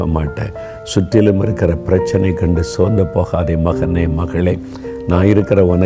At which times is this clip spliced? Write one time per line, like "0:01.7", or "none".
none